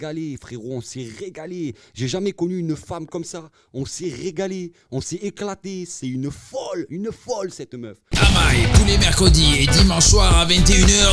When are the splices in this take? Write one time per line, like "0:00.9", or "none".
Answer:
0:08.0